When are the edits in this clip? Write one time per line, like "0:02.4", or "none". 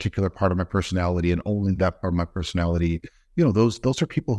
none